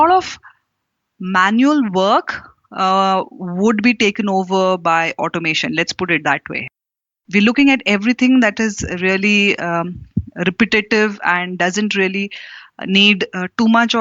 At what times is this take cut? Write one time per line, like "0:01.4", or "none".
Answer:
0:07.0